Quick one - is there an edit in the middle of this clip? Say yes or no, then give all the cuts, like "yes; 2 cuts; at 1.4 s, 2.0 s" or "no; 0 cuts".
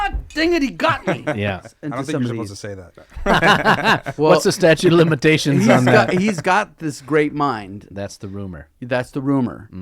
yes; 2 cuts; at 1.7 s, 7.8 s